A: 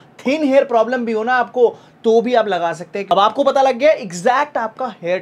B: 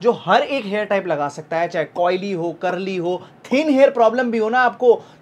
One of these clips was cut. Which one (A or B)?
A